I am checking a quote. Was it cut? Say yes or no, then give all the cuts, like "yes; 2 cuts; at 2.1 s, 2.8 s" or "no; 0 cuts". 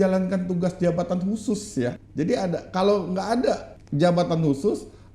yes; 2 cuts; at 2.0 s, 3.8 s